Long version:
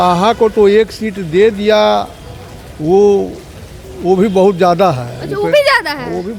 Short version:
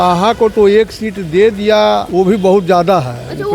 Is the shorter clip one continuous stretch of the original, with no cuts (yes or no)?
no